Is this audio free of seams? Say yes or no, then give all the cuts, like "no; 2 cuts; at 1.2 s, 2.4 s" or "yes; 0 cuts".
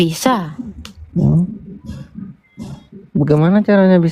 yes; 0 cuts